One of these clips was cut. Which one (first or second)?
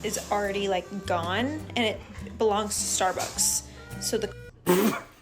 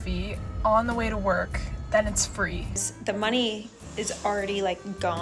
second